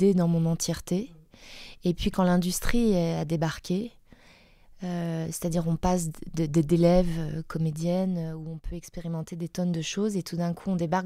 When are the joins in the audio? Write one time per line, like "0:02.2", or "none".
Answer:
none

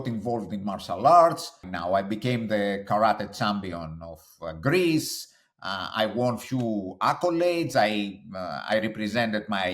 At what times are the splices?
0:01.7

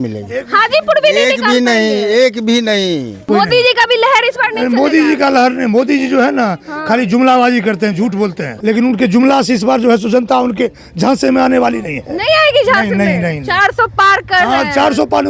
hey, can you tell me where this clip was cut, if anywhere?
0:03.2
0:08.5

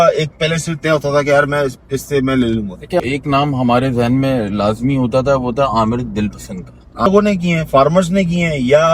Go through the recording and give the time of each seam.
0:03.0
0:07.1

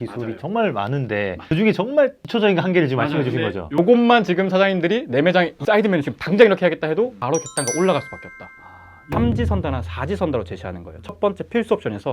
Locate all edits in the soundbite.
0:01.4
0:07.2
0:09.0

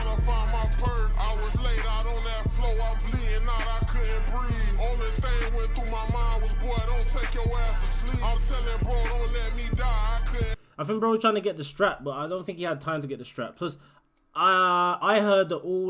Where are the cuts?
0:10.6

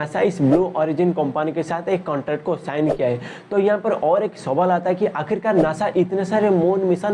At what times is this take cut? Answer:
none

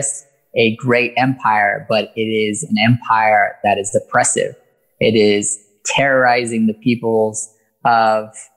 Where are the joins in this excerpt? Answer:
none

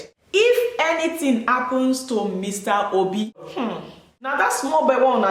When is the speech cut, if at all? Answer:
0:03.7

